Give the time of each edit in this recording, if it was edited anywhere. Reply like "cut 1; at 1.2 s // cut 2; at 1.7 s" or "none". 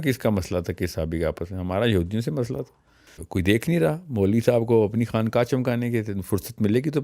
cut 1; at 3.1 s